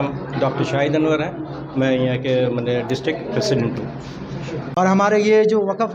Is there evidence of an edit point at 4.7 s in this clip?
yes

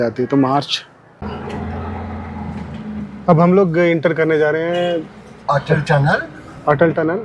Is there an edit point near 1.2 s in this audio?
yes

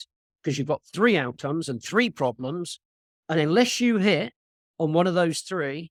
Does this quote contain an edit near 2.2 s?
no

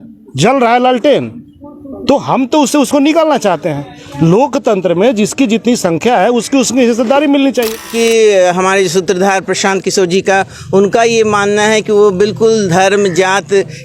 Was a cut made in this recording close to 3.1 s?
no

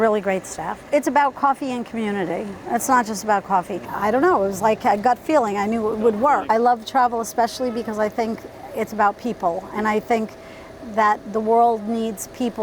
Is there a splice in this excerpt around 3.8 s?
yes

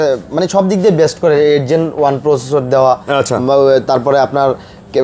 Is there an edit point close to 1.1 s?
no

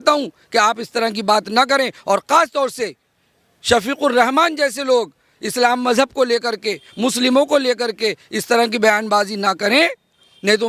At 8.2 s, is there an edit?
no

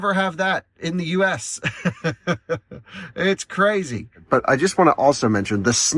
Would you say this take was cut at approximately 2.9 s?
no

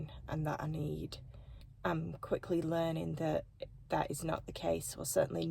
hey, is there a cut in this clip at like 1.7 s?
yes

